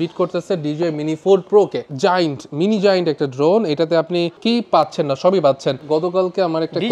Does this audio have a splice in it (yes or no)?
yes